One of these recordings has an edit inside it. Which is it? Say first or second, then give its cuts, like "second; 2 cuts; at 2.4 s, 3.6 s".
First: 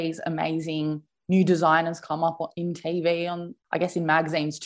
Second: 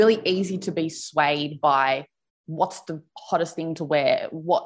first; 1 cut; at 3.5 s